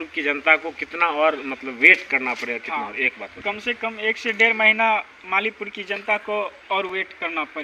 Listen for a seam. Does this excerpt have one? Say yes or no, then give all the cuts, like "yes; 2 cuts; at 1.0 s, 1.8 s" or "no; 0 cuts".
no; 0 cuts